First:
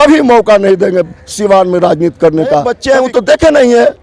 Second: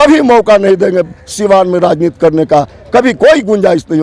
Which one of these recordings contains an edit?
first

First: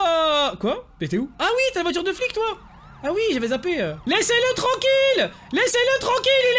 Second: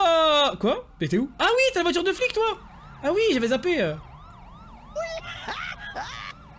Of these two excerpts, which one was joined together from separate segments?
first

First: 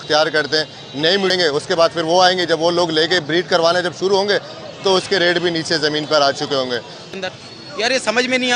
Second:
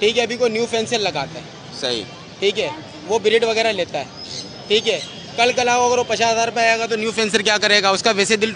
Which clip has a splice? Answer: first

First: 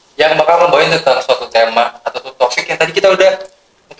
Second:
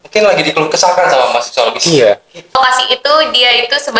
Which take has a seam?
second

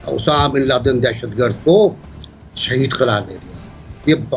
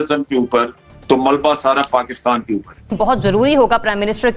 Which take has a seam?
second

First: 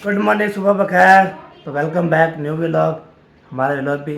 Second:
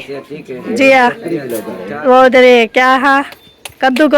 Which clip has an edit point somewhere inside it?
second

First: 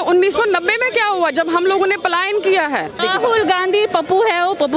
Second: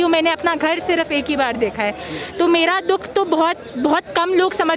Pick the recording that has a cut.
first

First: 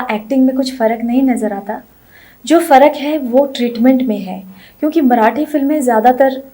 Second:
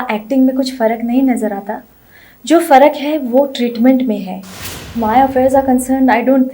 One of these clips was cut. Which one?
second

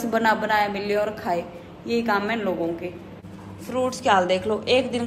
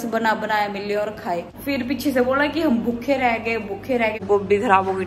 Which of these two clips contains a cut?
second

